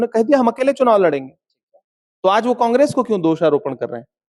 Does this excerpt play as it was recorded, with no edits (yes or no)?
yes